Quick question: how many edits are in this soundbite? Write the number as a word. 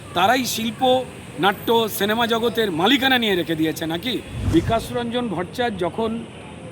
one